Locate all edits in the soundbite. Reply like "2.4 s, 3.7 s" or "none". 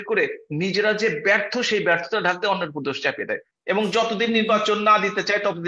3.5 s